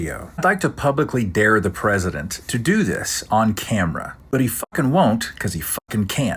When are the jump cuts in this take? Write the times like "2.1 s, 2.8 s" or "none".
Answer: none